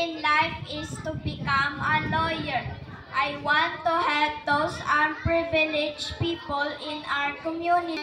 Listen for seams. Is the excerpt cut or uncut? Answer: uncut